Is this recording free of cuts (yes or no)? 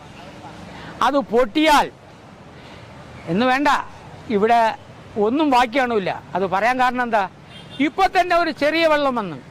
yes